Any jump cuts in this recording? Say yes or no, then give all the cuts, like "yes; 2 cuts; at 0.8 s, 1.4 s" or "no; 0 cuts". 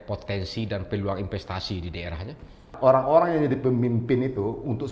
yes; 1 cut; at 2.7 s